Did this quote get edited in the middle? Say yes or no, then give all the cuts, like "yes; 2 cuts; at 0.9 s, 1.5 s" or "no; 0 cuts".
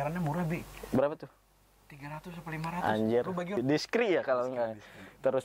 yes; 1 cut; at 3.6 s